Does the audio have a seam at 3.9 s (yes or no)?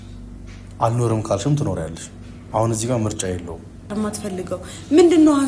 yes